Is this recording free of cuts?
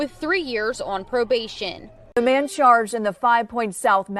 no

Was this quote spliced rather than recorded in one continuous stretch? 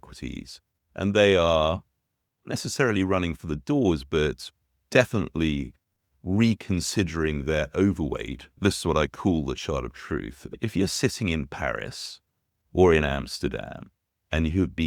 yes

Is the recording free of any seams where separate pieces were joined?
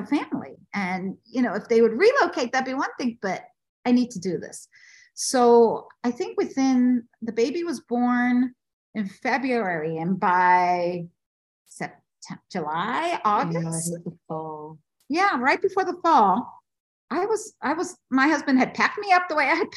yes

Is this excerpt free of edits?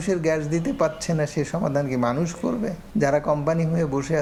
yes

